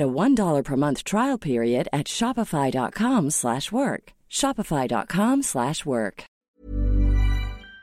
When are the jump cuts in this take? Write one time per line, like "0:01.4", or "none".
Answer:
0:06.3